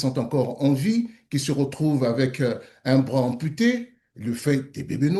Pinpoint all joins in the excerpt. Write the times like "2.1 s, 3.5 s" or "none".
none